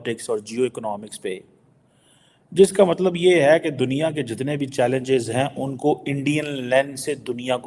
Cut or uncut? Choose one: uncut